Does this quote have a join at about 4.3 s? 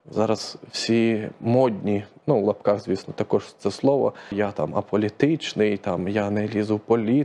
yes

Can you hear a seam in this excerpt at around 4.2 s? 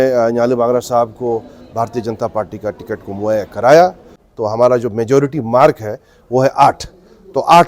yes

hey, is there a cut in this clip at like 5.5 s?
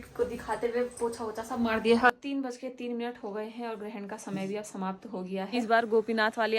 yes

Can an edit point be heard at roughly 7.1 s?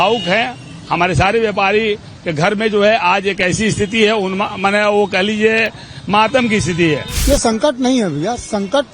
yes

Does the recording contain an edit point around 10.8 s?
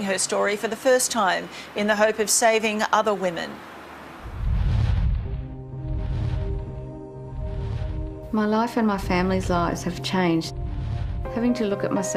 no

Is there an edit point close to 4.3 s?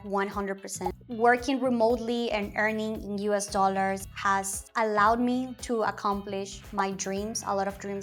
yes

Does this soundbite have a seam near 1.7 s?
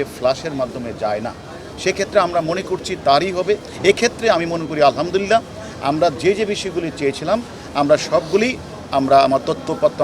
no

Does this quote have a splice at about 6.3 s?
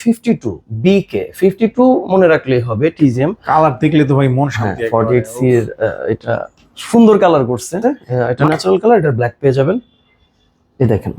no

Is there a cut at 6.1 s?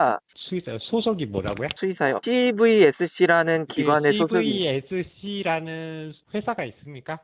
no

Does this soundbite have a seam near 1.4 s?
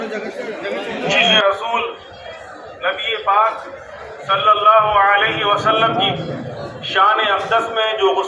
yes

